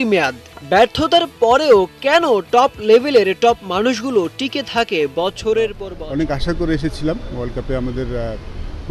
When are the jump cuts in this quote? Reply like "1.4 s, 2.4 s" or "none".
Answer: 5.9 s

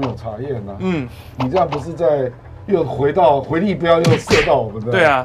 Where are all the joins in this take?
none

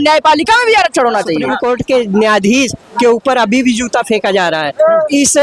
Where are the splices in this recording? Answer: 1.5 s

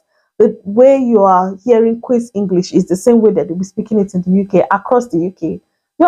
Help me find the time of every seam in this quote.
none

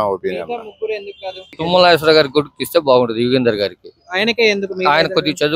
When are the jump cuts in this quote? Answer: 1.4 s

